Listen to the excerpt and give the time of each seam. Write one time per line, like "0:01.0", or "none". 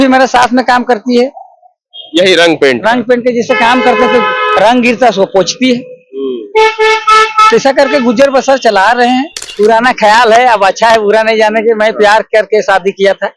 0:09.4